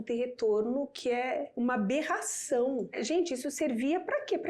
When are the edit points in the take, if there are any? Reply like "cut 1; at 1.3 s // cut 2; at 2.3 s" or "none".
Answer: cut 1; at 1.5 s // cut 2; at 3.0 s